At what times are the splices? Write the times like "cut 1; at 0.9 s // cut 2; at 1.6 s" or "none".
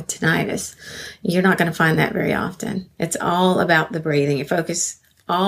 cut 1; at 2.9 s

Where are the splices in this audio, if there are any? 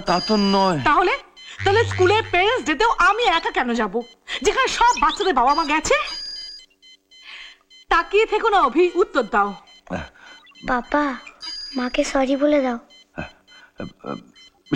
none

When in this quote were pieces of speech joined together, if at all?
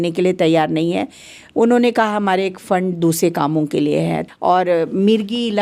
cut 1; at 4.2 s

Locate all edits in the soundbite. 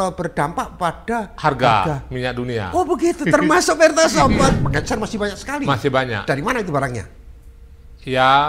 cut 1; at 4.5 s

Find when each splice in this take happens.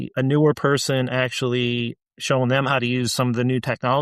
none

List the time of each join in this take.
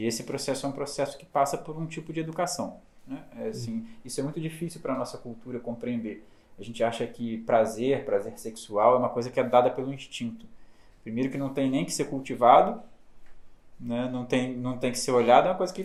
none

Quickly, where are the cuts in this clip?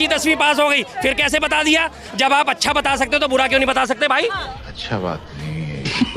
cut 1; at 2.2 s // cut 2; at 4.5 s

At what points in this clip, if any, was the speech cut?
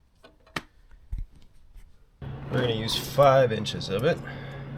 cut 1; at 2.2 s

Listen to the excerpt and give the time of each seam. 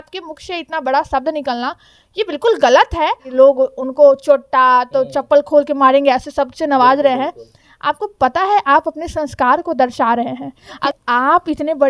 cut 1; at 3.2 s // cut 2; at 10.8 s

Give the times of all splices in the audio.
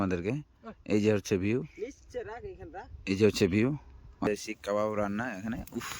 cut 1; at 4.3 s

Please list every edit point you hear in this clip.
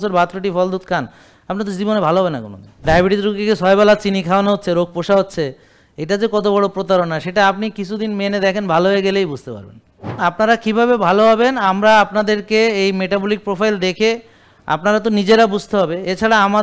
cut 1; at 2.8 s // cut 2; at 10.2 s

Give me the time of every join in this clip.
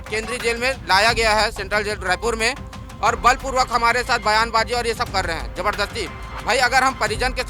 none

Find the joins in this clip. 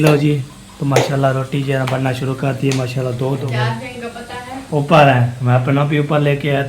cut 1; at 3.5 s

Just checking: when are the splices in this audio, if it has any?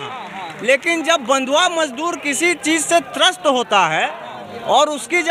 none

